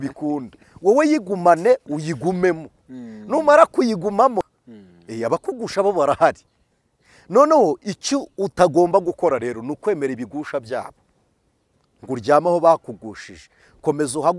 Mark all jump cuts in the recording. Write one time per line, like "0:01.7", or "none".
0:04.4